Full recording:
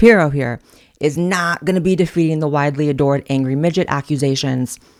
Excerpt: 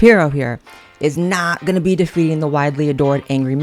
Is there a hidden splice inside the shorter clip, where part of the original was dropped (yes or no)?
no